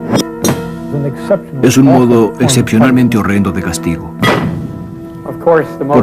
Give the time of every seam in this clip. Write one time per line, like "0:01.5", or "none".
none